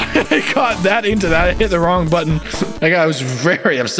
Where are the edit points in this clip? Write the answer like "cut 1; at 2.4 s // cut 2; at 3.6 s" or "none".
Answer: cut 1; at 2.7 s